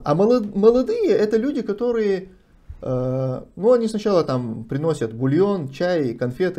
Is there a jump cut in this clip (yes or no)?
no